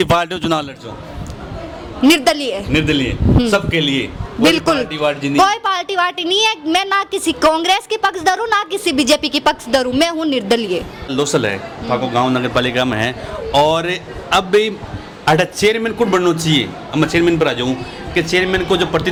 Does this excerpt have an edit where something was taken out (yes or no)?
no